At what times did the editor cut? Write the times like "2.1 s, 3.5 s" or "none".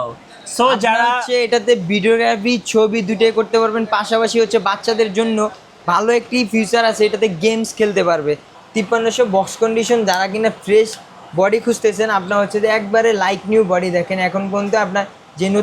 8.5 s